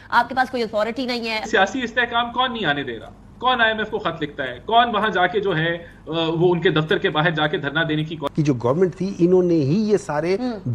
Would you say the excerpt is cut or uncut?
cut